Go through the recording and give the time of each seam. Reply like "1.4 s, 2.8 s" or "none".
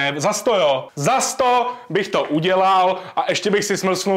none